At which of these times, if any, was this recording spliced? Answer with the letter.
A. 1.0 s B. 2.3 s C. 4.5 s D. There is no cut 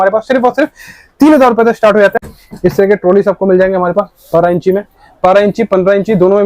B